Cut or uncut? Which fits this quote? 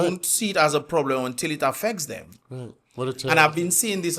uncut